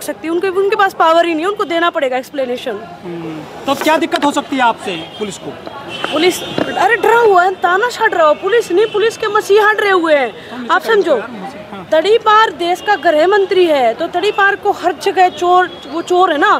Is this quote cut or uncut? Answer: uncut